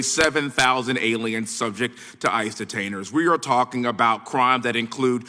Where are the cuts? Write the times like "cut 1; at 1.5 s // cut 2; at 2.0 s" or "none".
none